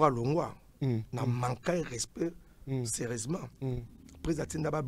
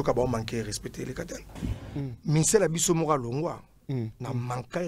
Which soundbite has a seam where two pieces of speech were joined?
second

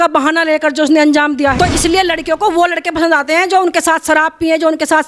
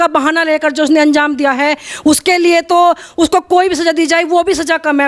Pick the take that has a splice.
first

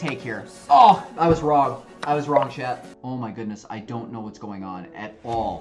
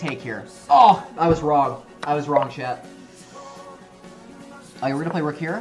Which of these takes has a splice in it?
first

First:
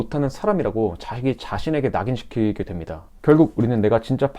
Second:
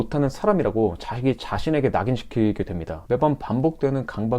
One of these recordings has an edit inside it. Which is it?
second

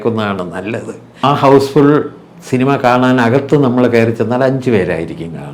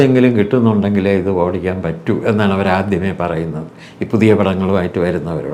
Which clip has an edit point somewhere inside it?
first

